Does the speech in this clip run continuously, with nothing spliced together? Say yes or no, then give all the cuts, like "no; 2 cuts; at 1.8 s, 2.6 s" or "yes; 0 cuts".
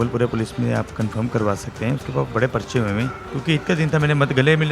no; 1 cut; at 3.2 s